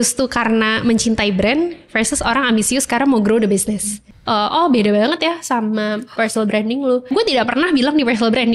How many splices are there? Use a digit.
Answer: 2